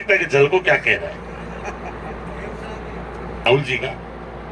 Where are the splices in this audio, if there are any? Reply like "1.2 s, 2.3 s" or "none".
3.5 s